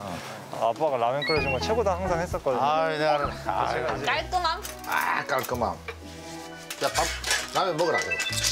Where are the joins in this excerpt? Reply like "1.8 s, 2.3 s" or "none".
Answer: 4.0 s